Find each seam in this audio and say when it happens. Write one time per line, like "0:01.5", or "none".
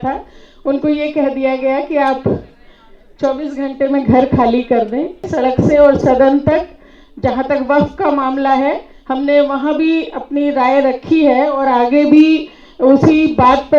0:05.2